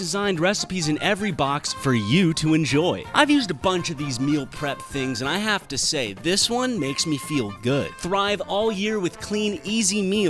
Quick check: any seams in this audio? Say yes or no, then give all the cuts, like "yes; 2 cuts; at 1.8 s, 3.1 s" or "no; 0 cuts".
yes; 2 cuts; at 3.0 s, 8.0 s